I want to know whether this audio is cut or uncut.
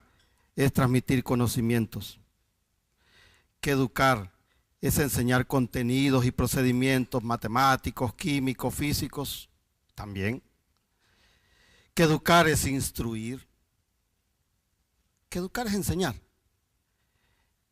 cut